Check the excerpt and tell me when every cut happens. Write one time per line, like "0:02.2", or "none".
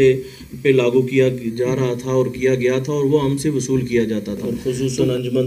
0:04.5